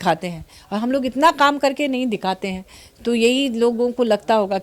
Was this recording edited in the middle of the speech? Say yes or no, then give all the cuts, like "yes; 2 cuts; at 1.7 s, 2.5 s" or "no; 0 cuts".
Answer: no; 0 cuts